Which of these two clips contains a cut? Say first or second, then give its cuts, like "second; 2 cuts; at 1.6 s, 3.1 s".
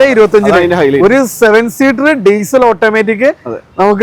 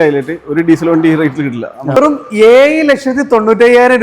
second; 1 cut; at 2.0 s